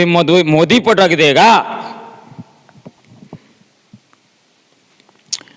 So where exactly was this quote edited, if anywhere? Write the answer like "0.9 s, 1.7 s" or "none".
none